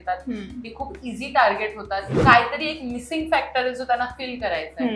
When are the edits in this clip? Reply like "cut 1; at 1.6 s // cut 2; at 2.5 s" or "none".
cut 1; at 2.1 s